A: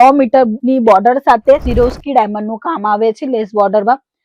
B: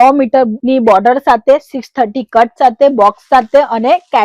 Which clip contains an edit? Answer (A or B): A